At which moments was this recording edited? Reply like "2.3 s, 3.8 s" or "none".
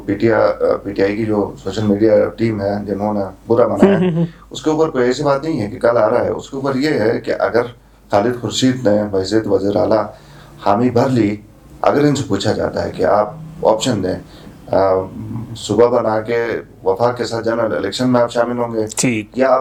none